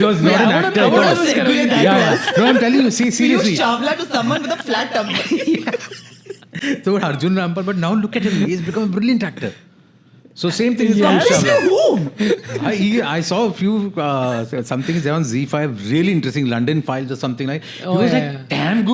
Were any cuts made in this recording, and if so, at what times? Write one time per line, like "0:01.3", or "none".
none